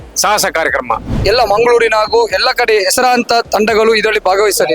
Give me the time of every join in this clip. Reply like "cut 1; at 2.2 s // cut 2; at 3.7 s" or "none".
cut 1; at 1.1 s